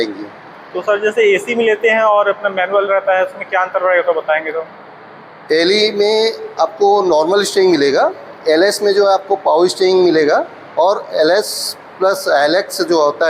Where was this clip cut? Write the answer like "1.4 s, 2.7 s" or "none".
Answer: none